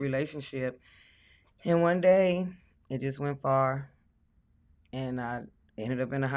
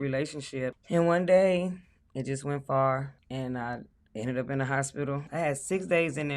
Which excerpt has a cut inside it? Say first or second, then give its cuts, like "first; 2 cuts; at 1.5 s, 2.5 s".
second; 3 cuts; at 0.8 s, 3.2 s, 5.2 s